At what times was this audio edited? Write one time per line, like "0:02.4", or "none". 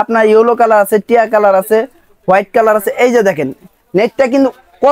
none